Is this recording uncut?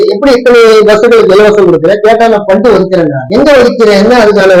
yes; 0 cuts

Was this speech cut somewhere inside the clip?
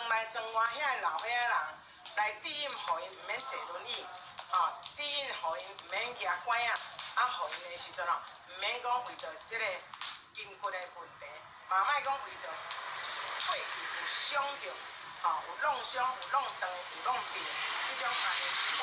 no; 0 cuts

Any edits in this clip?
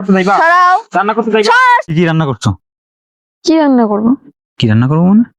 yes; 1 cut; at 1.9 s

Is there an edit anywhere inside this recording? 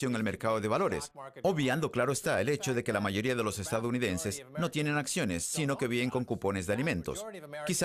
no; 0 cuts

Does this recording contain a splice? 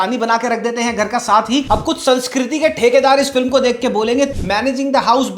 yes; 2 cuts; at 1.6 s, 4.3 s

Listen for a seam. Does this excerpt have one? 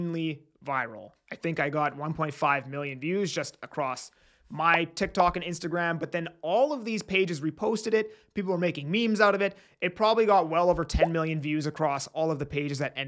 no; 0 cuts

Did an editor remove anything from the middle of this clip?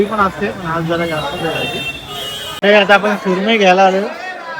yes; 1 cut; at 2.5 s

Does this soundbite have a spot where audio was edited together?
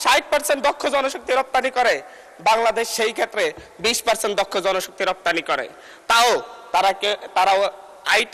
no; 0 cuts

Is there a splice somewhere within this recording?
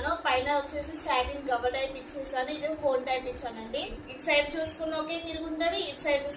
yes; 1 cut; at 4.0 s

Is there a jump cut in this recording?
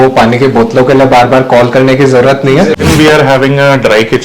yes; 1 cut; at 2.9 s

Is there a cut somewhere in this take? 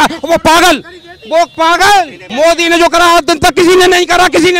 yes; 1 cut; at 2.2 s

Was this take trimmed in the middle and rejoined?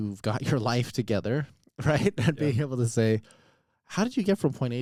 no; 0 cuts

